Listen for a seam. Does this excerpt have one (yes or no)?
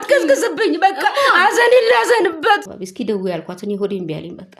yes